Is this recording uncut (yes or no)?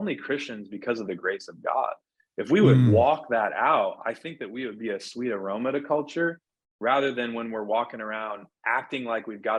yes